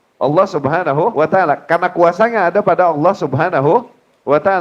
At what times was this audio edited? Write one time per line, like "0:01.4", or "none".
0:01.1

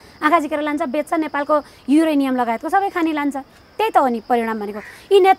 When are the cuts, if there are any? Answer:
none

